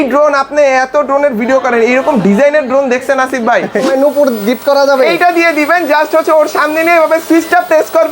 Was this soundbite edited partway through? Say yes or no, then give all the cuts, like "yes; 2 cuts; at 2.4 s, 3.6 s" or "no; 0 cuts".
yes; 1 cut; at 3.9 s